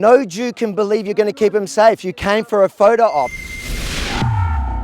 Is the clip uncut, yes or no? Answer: no